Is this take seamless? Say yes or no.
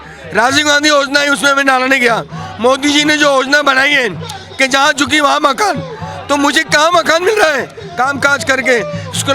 no